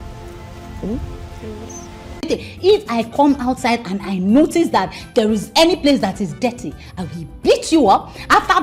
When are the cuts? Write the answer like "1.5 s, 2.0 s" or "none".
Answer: 2.3 s